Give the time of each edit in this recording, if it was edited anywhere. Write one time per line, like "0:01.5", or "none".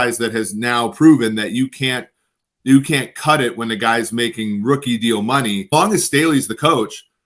0:05.7